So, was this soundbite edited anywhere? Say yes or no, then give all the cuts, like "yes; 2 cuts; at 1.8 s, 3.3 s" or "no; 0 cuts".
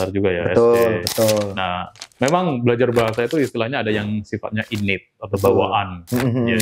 no; 0 cuts